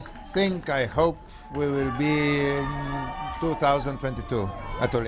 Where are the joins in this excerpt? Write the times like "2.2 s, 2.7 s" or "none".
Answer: none